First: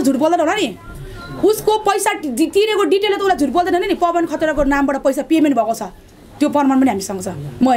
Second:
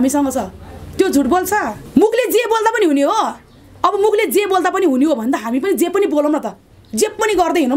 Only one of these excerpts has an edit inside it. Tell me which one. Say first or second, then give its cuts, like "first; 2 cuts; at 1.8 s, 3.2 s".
second; 1 cut; at 1.8 s